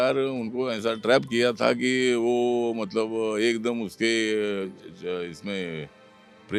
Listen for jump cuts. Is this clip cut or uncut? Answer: uncut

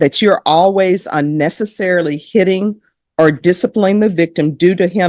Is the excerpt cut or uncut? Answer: uncut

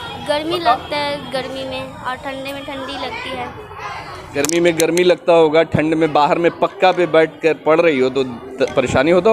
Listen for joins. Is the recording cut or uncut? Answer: uncut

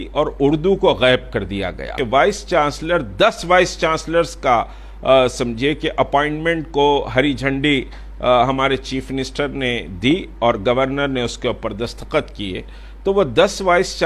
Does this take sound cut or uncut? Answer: cut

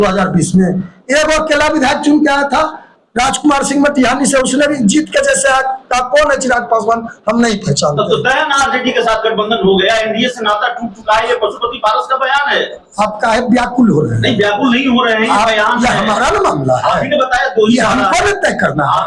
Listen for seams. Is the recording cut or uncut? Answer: uncut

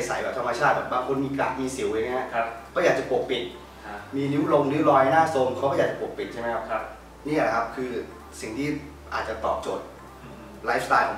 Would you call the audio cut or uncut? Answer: uncut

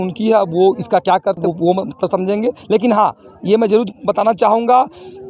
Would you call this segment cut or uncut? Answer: uncut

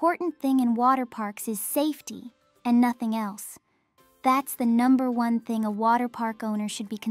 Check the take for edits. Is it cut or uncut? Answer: uncut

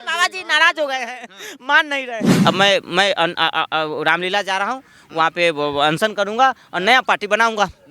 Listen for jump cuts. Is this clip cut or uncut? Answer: cut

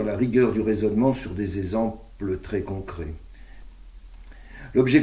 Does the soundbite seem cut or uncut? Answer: cut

